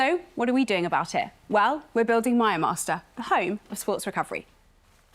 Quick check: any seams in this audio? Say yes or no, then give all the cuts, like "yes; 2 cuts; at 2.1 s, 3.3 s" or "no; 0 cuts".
no; 0 cuts